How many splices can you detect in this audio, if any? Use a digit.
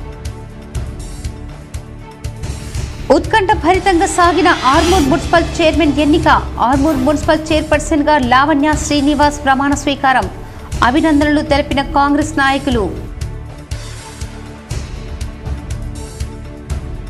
0